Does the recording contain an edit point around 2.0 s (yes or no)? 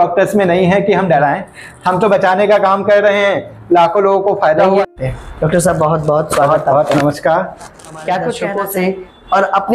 no